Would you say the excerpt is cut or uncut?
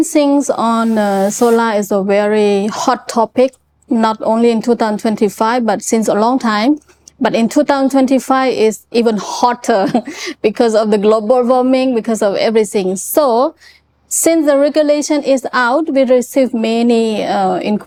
uncut